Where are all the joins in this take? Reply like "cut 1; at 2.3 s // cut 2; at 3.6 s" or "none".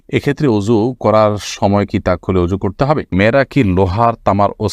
cut 1; at 3.1 s